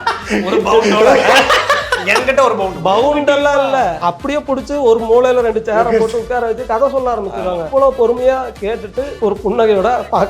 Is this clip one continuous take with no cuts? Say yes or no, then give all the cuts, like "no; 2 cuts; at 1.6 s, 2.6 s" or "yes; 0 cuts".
no; 3 cuts; at 4.0 s, 7.6 s, 9.1 s